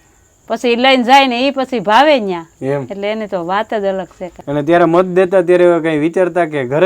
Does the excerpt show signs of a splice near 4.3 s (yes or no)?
yes